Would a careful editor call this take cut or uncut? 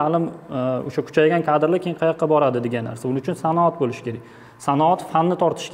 uncut